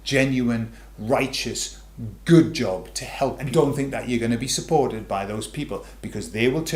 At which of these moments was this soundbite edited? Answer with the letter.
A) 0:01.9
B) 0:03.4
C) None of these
B